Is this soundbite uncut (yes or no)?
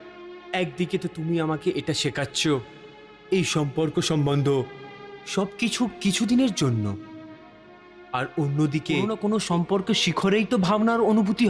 no